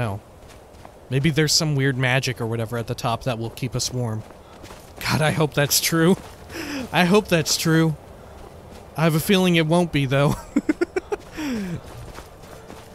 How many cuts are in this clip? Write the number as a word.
one